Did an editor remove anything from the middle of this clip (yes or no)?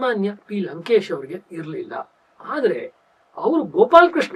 no